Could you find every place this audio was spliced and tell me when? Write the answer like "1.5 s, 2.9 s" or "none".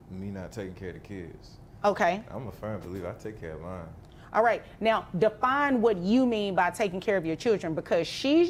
none